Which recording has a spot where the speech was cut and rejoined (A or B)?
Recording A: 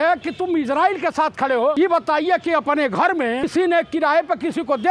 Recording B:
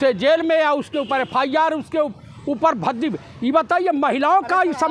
A